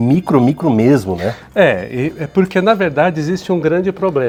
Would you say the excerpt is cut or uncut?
uncut